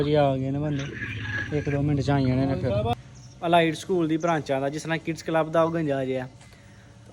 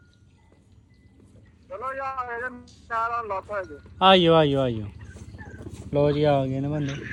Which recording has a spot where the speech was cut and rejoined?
first; 1 cut; at 2.9 s

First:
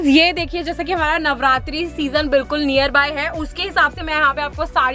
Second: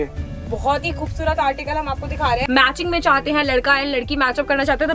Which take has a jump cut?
second; 1 cut; at 2.4 s

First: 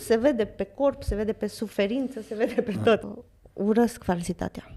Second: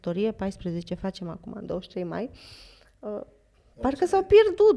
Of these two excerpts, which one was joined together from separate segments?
first; 1 cut; at 3.1 s

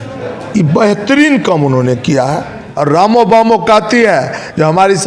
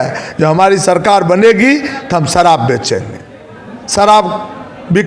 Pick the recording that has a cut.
first; 1 cut; at 2.6 s

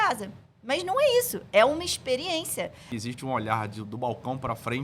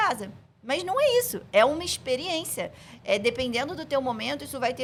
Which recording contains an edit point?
first; 1 cut; at 2.9 s

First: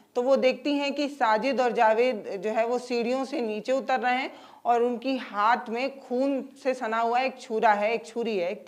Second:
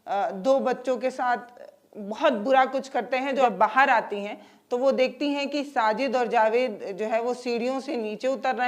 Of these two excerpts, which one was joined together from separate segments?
second; 1 cut; at 3.4 s

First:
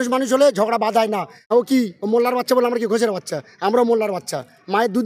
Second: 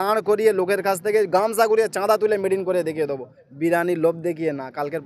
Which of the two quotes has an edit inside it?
first; 1 cut; at 1.3 s

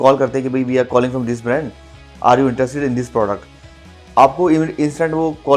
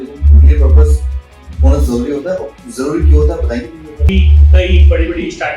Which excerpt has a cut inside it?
second; 1 cut; at 4.1 s

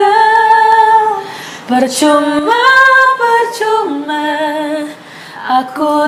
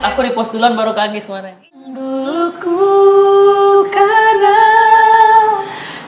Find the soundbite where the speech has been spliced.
second; 1 cut; at 1.8 s

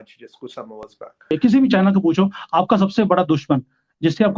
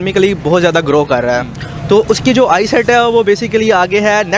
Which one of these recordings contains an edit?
first; 1 cut; at 1.3 s

